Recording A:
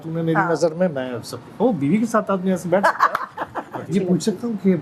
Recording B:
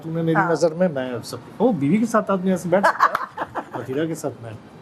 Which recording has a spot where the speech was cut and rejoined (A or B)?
A